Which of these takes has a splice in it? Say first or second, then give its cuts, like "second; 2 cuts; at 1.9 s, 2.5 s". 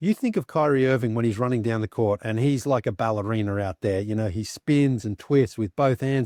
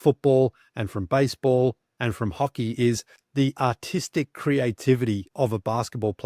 second; 2 cuts; at 3.1 s, 5.3 s